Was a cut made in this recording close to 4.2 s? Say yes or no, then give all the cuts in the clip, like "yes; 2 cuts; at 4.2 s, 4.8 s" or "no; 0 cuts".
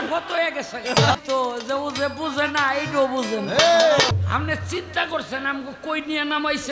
yes; 2 cuts; at 1.2 s, 4.2 s